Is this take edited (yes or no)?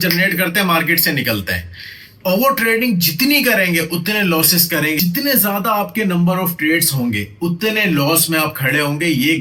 no